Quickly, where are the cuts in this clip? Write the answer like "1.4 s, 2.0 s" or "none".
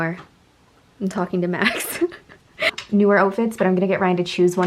2.7 s

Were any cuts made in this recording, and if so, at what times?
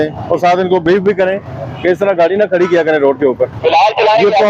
none

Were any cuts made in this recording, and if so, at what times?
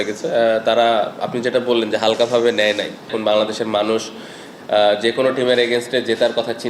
3.1 s

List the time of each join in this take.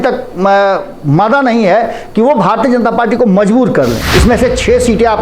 4.0 s

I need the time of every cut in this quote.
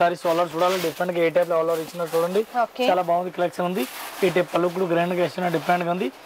none

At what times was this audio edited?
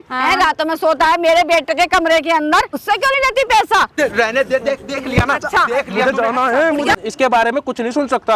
2.8 s, 3.9 s, 7.0 s

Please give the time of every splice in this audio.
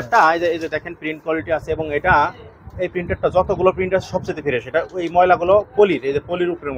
none

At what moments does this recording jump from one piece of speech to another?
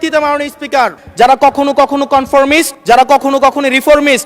1.0 s

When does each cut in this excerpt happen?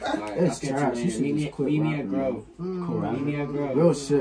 none

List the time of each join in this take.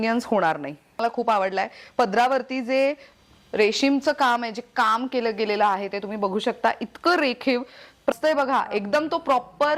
1.0 s, 8.1 s

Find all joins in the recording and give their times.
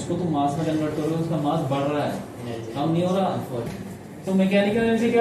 3.8 s

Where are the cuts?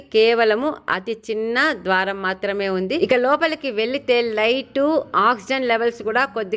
none

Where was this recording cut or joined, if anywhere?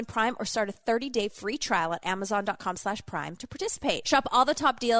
4.0 s

